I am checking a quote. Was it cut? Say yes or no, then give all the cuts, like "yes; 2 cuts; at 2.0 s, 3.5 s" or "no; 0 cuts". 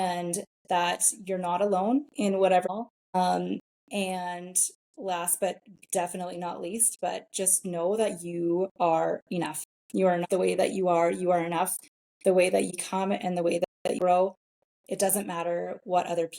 yes; 3 cuts; at 2.6 s, 10.2 s, 12.7 s